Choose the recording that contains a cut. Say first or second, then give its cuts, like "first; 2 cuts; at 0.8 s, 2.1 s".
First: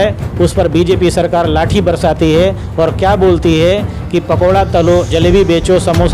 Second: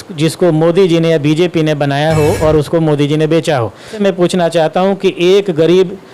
second; 1 cut; at 4.0 s